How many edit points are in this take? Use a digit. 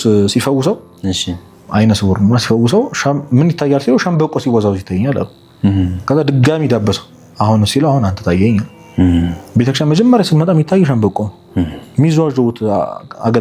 0